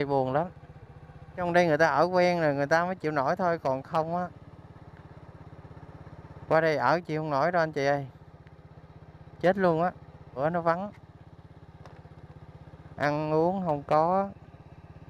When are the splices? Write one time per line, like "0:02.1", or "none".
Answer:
0:01.4
0:10.4